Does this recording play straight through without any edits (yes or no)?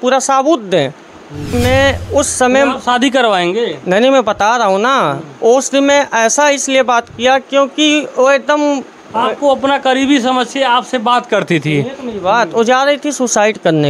no